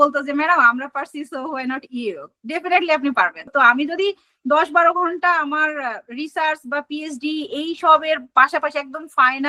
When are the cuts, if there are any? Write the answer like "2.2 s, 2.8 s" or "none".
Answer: none